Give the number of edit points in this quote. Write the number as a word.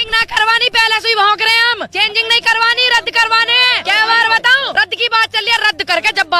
three